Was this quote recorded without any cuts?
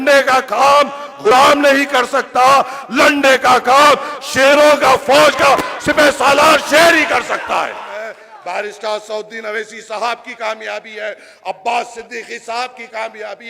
no; 2 cuts; at 1.3 s, 8.2 s

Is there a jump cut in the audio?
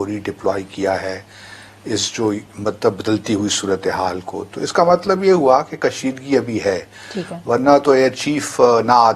no; 0 cuts

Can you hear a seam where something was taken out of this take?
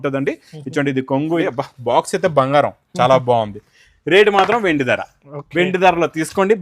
yes; 1 cut; at 1.4 s

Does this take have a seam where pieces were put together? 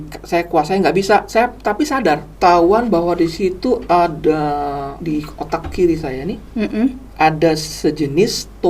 yes; 2 cuts; at 2.3 s, 4.9 s

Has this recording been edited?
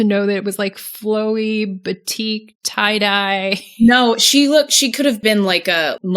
yes; 1 cut; at 5.2 s

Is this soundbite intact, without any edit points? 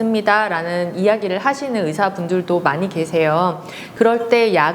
no; 1 cut; at 3.8 s

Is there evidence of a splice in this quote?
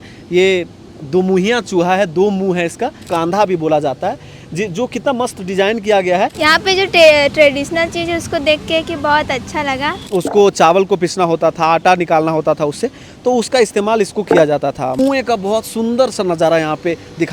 yes; 4 cuts; at 3.1 s, 6.3 s, 10.0 s, 15.0 s

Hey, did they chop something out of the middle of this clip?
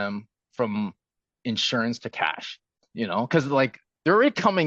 yes; 1 cut; at 2.8 s

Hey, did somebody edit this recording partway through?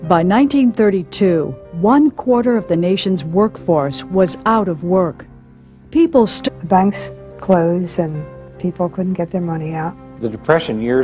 no; 0 cuts

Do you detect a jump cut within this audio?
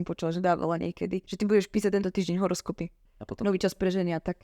yes; 2 cuts; at 1.3 s, 3.0 s

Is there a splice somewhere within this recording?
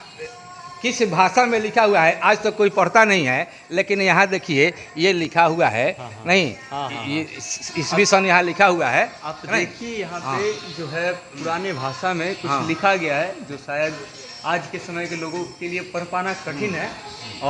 no; 0 cuts

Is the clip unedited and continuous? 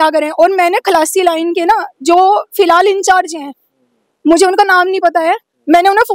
yes; 0 cuts

